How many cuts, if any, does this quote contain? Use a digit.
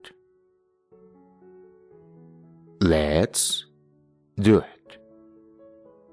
0